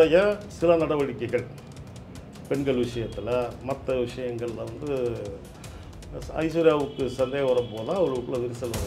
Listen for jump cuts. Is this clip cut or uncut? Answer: uncut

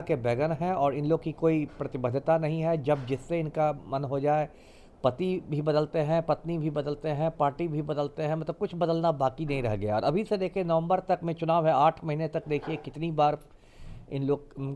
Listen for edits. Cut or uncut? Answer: uncut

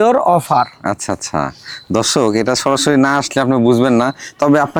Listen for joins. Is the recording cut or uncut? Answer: uncut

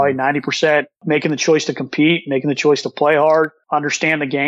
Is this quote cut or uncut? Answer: cut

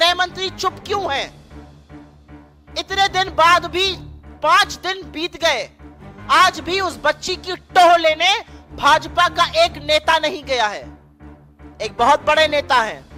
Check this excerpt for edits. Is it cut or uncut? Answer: uncut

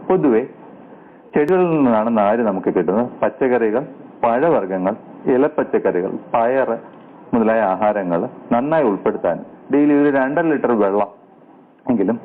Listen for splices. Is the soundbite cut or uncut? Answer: cut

